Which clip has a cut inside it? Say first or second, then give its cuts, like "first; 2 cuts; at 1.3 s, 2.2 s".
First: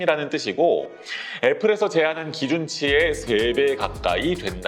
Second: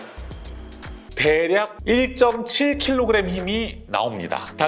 second; 1 cut; at 1.1 s